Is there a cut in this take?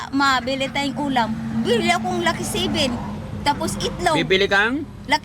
no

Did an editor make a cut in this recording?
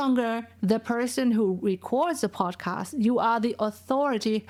no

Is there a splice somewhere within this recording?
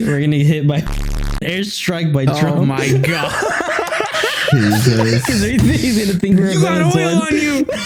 no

